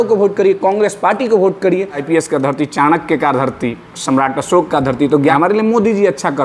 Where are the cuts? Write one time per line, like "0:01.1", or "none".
0:02.0
0:05.3